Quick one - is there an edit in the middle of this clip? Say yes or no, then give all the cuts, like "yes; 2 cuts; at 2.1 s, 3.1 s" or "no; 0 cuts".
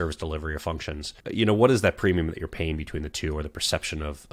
no; 0 cuts